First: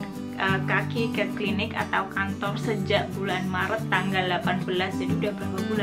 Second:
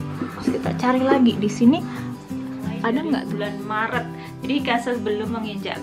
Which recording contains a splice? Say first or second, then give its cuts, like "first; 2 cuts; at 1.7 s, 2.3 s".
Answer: second; 1 cut; at 3.4 s